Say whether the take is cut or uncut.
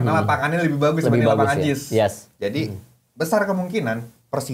uncut